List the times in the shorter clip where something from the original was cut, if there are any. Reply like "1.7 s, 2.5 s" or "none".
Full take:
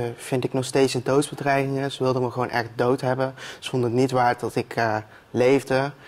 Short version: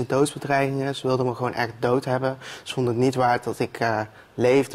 none

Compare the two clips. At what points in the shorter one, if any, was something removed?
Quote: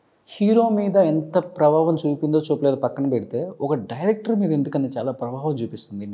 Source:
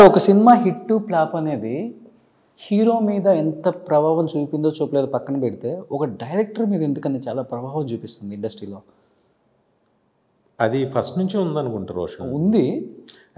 none

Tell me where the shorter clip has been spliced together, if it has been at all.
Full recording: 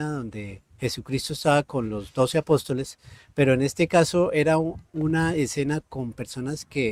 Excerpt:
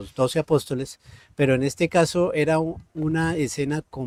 none

